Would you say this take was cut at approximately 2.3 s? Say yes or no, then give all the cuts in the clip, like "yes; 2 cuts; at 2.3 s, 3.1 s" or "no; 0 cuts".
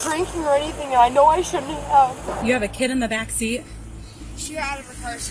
yes; 1 cut; at 2.3 s